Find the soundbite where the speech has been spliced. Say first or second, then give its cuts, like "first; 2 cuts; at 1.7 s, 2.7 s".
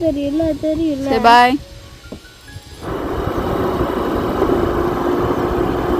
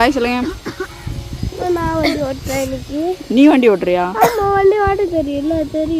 first; 1 cut; at 2.8 s